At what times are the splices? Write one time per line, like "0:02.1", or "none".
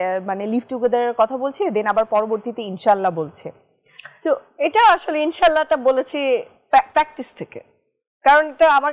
none

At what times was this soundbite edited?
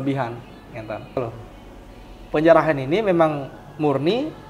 0:01.2

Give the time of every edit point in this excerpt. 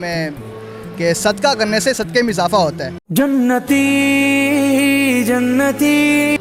none

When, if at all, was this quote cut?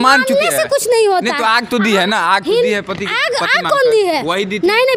none

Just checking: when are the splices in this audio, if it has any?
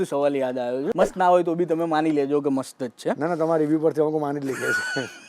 0:00.9

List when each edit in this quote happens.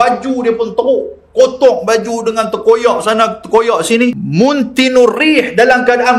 0:04.2

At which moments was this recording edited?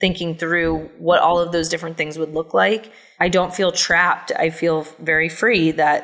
0:00.9
0:03.0

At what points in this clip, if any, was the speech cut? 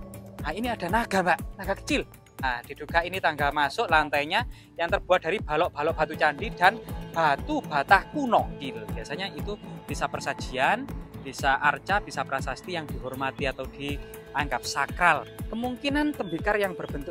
0:02.4
0:08.5
0:15.3

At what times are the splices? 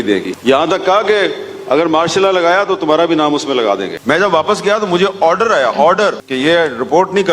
0:03.9

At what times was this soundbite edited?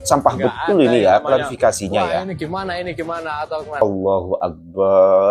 0:03.8

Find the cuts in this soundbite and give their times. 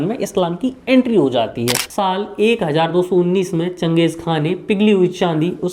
0:01.9

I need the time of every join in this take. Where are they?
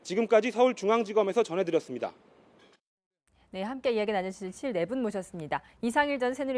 none

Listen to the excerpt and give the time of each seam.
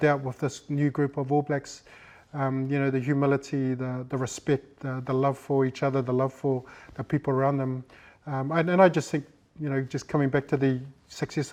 none

